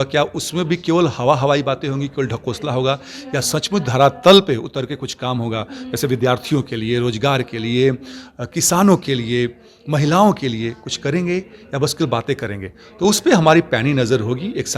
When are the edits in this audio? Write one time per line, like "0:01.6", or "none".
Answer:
none